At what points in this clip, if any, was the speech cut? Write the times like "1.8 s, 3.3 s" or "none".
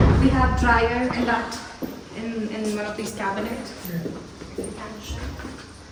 none